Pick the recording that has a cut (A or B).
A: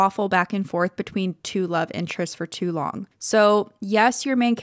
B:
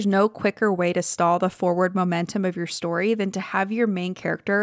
A